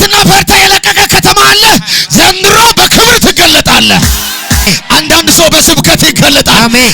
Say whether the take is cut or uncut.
cut